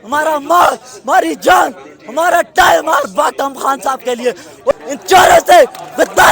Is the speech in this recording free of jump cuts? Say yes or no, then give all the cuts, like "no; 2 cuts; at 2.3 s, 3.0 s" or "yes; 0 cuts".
no; 1 cut; at 4.7 s